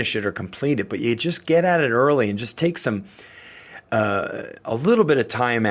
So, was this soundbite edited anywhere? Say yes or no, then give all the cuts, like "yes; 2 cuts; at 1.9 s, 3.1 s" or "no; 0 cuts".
no; 0 cuts